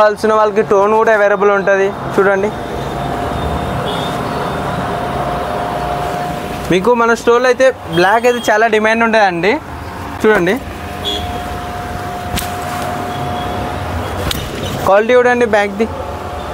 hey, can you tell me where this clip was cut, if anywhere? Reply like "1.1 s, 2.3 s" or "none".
none